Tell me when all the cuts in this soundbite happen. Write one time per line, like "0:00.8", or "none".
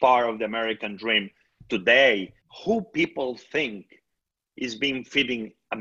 0:02.4